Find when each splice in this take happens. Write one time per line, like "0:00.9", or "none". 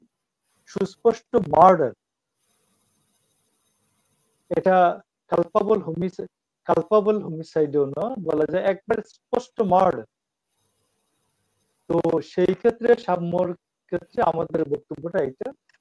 none